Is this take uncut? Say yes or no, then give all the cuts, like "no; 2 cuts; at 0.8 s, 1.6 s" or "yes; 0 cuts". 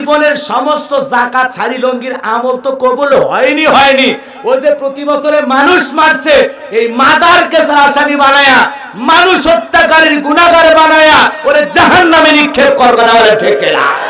yes; 0 cuts